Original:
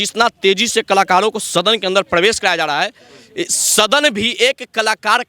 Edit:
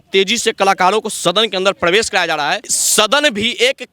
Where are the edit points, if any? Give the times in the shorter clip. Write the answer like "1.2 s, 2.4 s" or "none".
2.8 s